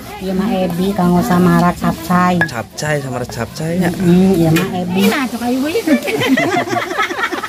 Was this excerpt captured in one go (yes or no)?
no